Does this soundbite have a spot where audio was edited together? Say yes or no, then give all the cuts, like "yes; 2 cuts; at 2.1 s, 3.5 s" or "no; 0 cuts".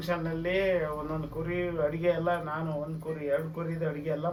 no; 0 cuts